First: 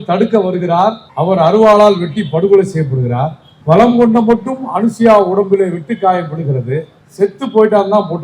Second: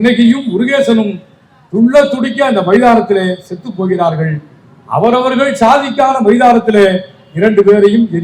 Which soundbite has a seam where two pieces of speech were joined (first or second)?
first